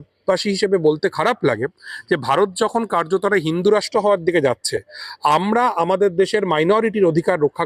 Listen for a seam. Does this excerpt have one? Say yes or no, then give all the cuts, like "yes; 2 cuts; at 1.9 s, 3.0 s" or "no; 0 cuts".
no; 0 cuts